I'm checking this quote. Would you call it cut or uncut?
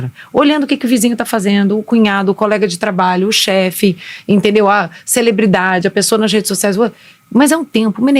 uncut